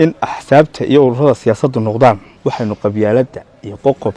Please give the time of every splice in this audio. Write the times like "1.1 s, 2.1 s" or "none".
2.3 s